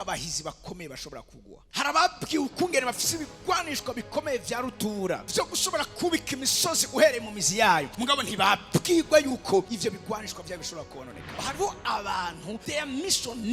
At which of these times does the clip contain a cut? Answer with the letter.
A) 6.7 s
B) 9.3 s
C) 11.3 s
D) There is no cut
C